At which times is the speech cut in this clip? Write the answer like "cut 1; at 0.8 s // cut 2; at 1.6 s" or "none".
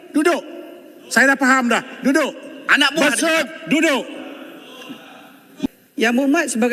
cut 1; at 5.7 s